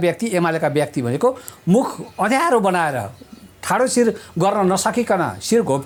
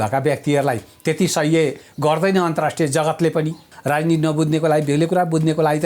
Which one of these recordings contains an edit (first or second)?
second